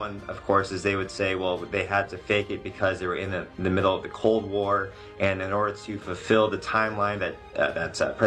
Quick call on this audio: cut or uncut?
uncut